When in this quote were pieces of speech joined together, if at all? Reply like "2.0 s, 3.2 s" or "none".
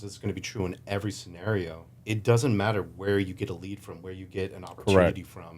1.9 s